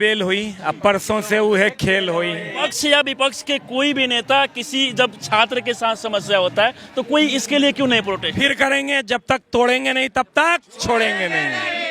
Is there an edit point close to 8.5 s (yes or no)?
yes